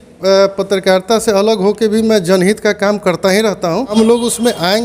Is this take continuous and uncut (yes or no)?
no